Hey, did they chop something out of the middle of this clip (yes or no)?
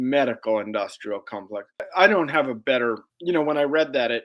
yes